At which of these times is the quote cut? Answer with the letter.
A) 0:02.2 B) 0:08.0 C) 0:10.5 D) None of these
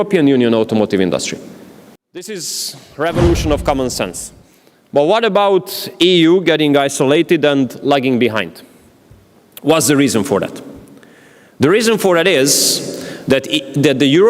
A